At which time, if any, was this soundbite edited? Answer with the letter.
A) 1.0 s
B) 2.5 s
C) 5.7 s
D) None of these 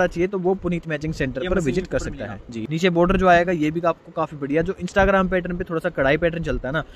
B